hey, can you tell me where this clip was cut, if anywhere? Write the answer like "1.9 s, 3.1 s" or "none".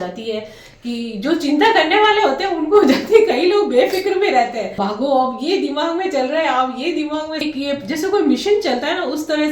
4.8 s, 7.4 s

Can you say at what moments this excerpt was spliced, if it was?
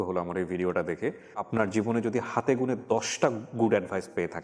1.5 s

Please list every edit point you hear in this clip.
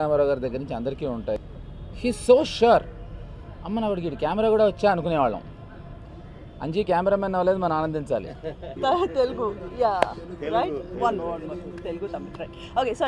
1.4 s, 8.7 s

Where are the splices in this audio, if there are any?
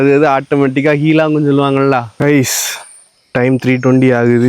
2.1 s

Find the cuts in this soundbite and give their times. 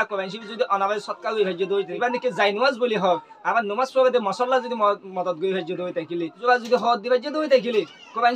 1.9 s, 6.4 s

